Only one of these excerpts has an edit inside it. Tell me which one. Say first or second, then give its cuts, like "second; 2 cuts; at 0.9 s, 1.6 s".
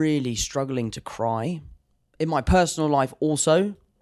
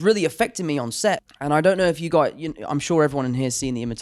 second; 1 cut; at 1.3 s